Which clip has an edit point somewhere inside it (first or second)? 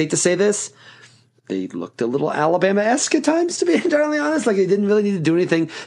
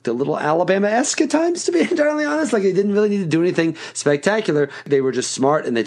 second